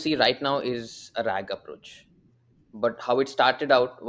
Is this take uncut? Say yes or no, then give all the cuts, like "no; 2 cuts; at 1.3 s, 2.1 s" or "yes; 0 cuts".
yes; 0 cuts